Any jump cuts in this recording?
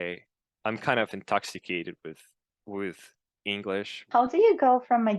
yes; 1 cut; at 4.1 s

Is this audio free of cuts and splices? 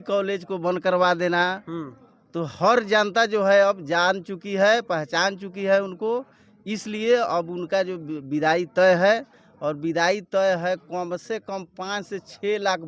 yes; 0 cuts

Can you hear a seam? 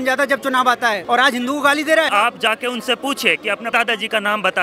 yes; 2 cuts; at 1.0 s, 2.1 s

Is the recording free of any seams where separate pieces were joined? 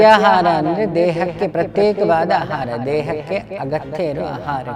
yes; 0 cuts

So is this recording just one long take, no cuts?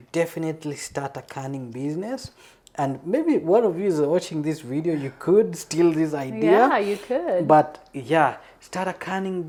yes; 0 cuts

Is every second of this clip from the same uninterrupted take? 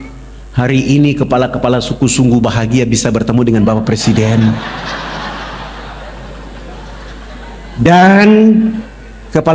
yes; 0 cuts

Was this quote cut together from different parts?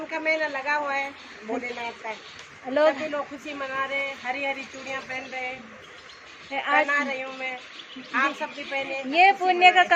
no; 0 cuts

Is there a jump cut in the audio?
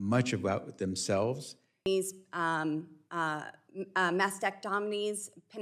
yes; 1 cut; at 1.9 s

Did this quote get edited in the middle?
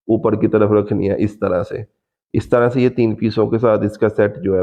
no; 0 cuts

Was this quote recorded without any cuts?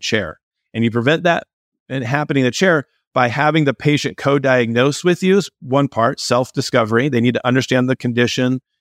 yes; 0 cuts

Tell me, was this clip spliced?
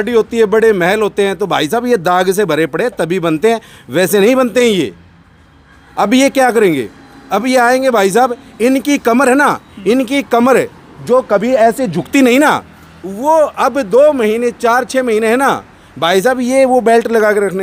no; 0 cuts

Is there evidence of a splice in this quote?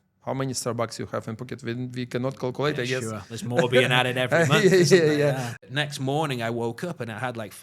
yes; 1 cut; at 5.5 s

